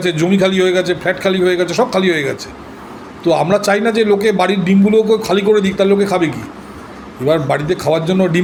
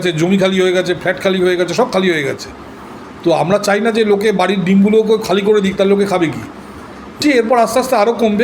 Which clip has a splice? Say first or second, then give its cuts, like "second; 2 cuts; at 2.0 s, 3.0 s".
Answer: second; 1 cut; at 7.2 s